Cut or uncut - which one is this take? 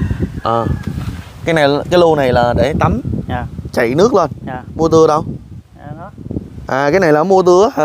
uncut